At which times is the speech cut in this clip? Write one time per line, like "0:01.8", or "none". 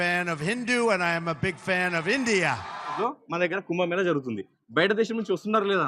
0:02.9